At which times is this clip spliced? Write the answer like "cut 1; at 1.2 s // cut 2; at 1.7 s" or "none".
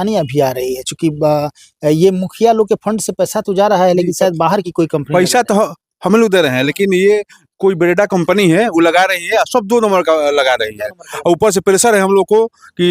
none